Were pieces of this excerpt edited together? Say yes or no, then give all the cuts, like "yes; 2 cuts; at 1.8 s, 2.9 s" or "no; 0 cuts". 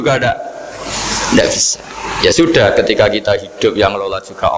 no; 0 cuts